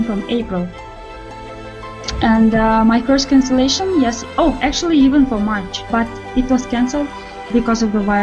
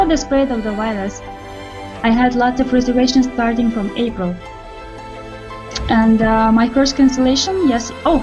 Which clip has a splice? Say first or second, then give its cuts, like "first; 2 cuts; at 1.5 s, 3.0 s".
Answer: first; 2 cuts; at 5.8 s, 7.2 s